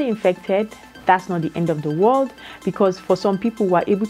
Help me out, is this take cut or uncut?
uncut